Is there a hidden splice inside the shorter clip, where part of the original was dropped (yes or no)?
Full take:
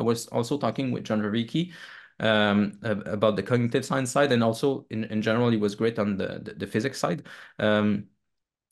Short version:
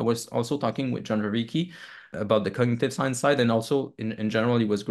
yes